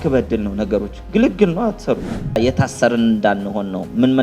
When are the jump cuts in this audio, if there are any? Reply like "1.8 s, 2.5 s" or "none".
2.2 s